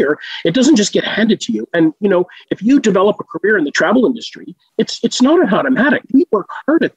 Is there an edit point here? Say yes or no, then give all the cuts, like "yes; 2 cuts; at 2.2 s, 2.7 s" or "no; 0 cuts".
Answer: yes; 2 cuts; at 3.7 s, 6.0 s